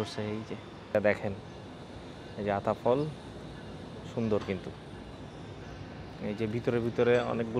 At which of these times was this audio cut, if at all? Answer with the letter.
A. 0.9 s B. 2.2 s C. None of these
A